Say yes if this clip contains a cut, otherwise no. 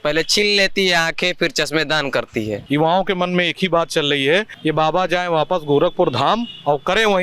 yes